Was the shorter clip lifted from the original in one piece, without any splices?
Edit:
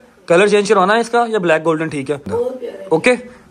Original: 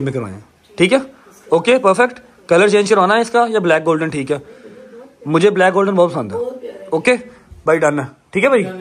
no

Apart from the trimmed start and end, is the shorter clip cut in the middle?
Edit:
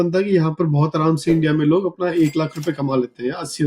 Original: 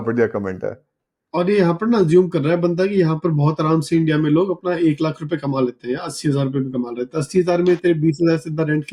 no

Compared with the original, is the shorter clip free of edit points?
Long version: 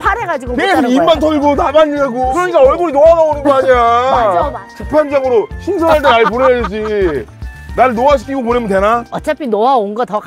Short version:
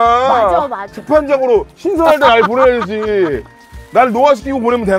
yes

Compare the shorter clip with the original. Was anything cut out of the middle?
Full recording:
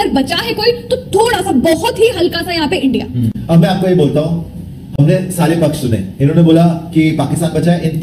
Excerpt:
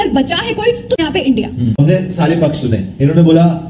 yes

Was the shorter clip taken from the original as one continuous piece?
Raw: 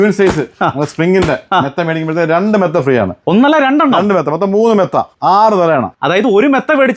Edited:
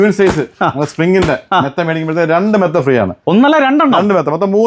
yes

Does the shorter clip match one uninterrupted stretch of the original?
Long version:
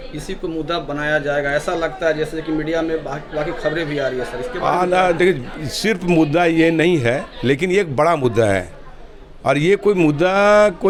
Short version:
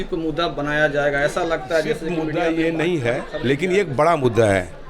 no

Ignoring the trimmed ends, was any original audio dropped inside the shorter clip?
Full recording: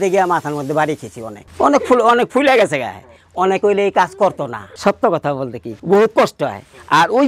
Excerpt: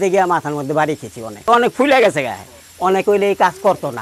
yes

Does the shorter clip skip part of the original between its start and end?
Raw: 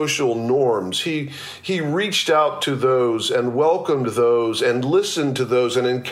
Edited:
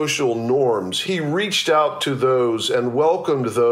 yes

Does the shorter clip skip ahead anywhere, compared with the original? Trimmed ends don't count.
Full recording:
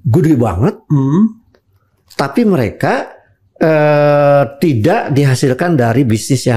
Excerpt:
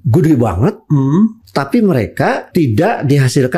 yes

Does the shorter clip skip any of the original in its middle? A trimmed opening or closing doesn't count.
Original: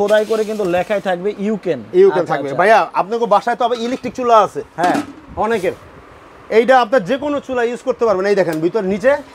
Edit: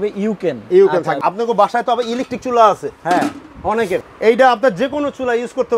yes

